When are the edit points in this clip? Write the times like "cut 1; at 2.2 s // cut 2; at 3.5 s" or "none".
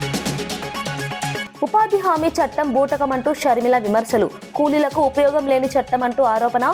cut 1; at 1.4 s